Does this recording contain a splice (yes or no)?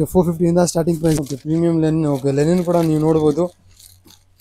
yes